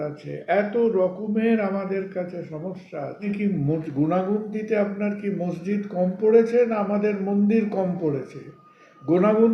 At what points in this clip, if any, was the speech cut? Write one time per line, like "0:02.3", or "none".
0:03.2